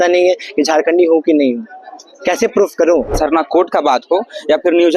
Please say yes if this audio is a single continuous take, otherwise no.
no